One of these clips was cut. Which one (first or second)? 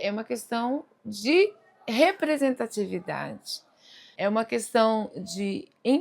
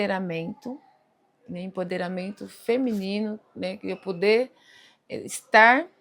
first